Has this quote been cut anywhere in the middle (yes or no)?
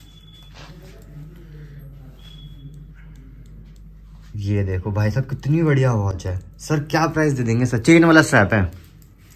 no